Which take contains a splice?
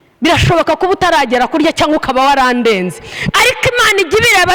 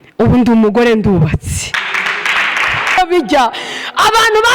second; 1 cut; at 3.0 s

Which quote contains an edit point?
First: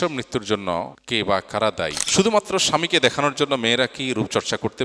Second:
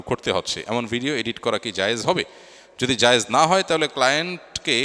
first; 2 cuts; at 1.0 s, 2.0 s

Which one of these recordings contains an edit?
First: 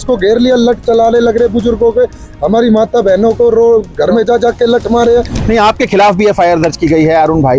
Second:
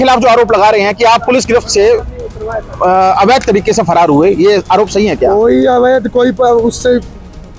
first; 1 cut; at 5.4 s

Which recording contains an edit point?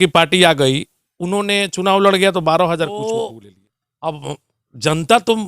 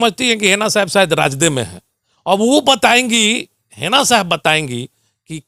first; 1 cut; at 2.9 s

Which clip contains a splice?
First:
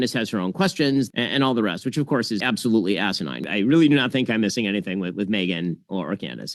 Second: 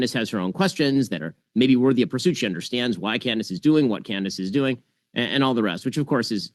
first; 3 cuts; at 1.1 s, 2.4 s, 3.5 s

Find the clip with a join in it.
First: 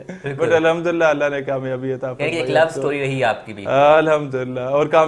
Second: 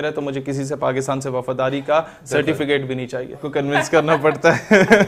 second; 1 cut; at 3.4 s

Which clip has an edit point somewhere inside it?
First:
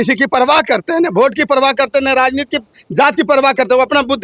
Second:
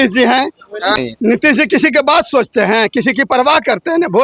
second; 1 cut; at 0.9 s

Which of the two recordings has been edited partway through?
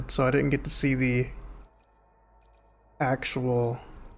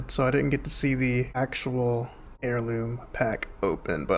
second; 2 cuts; at 1.4 s, 2.2 s

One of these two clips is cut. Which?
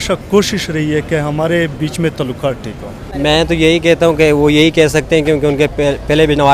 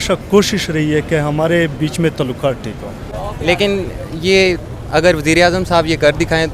second; 1 cut; at 3.0 s

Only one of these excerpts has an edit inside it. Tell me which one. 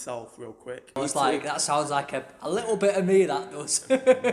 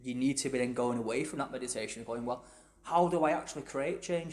first; 1 cut; at 1.0 s

